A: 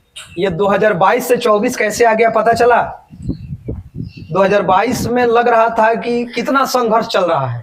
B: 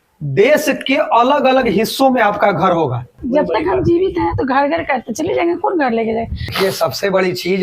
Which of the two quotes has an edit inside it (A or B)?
B